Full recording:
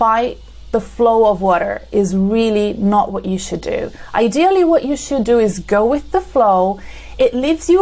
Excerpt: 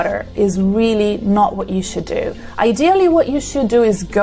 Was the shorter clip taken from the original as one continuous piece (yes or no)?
yes